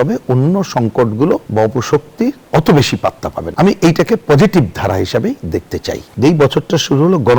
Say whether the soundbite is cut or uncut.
cut